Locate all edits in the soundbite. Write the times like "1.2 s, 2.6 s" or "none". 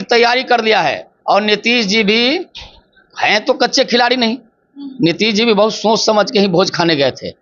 1.1 s